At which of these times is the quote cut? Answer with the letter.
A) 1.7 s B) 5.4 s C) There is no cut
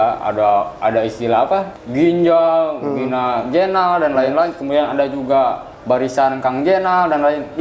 A